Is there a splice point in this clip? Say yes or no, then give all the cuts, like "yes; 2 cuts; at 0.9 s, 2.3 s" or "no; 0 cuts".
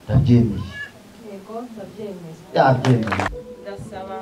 yes; 1 cut; at 3.3 s